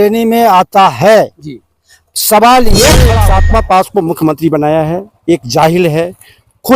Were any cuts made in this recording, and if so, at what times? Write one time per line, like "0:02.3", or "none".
0:03.1